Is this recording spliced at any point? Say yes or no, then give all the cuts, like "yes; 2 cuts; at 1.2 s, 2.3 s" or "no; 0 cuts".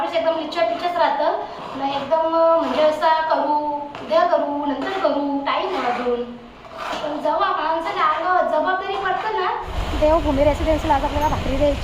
yes; 1 cut; at 9.7 s